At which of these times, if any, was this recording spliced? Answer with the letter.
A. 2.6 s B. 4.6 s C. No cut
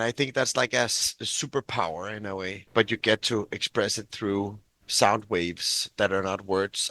A